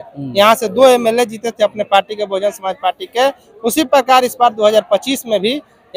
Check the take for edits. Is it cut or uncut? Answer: uncut